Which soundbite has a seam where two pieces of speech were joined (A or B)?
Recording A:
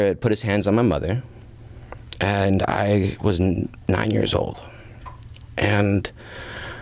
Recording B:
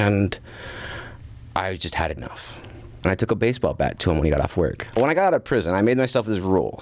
B